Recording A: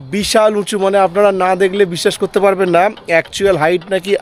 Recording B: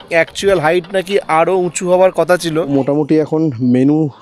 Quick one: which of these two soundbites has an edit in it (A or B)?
B